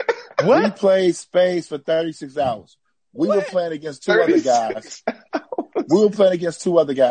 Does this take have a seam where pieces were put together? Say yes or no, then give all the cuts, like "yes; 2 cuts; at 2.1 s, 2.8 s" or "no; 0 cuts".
no; 0 cuts